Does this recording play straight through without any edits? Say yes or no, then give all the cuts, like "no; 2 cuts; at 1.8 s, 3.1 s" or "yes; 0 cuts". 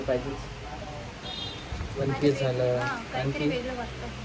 yes; 0 cuts